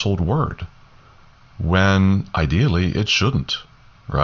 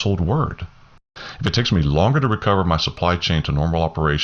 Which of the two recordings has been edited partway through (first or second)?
second